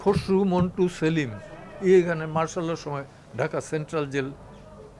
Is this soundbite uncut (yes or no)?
yes